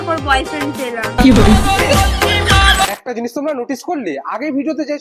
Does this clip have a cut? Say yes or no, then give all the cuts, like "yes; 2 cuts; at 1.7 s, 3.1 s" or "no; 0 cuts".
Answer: no; 0 cuts